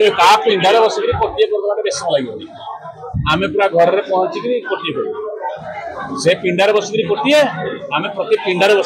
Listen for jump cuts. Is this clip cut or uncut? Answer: uncut